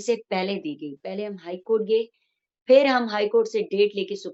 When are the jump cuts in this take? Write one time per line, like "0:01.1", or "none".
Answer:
none